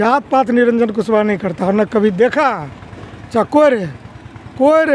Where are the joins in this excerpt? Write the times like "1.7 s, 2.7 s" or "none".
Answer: none

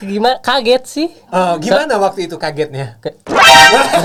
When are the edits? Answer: none

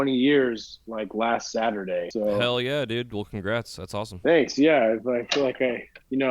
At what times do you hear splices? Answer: 2.1 s

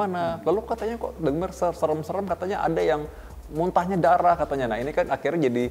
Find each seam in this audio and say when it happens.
none

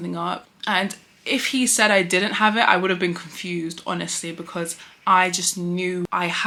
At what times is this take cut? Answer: none

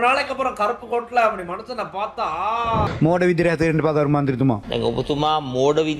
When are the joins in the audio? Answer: 2.9 s

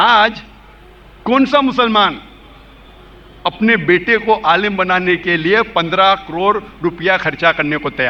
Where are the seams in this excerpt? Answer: none

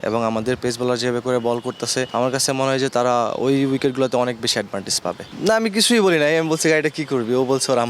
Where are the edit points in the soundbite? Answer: 2.1 s, 5.3 s

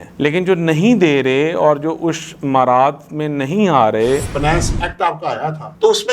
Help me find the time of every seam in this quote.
4.3 s

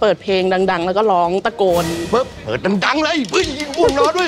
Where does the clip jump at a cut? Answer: 2.0 s

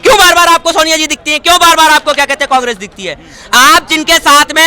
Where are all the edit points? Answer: none

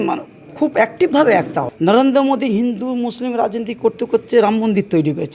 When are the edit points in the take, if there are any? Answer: 1.7 s

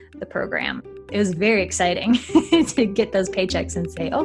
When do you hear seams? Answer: 0.9 s

